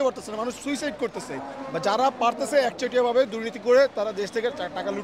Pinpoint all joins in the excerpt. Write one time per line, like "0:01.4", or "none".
none